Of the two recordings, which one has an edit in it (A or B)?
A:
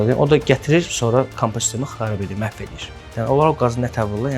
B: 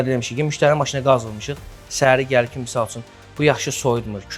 A